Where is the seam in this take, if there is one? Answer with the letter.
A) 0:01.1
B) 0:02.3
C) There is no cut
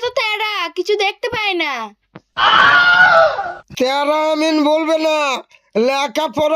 C